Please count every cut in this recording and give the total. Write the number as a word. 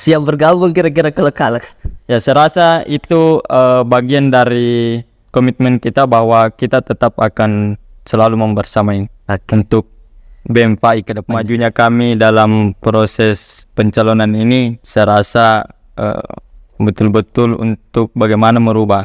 one